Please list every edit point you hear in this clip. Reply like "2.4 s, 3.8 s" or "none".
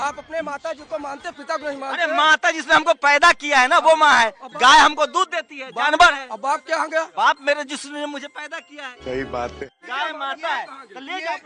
7.1 s, 8.9 s, 9.8 s